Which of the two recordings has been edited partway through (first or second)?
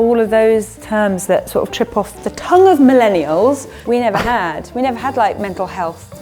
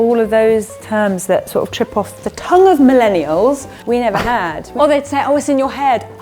second